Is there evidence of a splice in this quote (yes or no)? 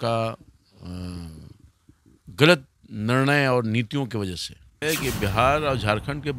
yes